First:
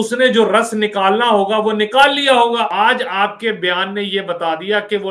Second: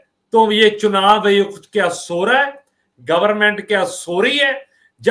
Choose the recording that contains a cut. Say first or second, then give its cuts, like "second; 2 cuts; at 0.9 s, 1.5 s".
first; 1 cut; at 2.7 s